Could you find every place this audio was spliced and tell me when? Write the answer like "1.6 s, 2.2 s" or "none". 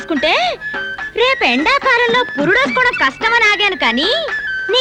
none